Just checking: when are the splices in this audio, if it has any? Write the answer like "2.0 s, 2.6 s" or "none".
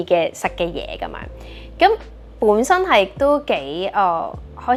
none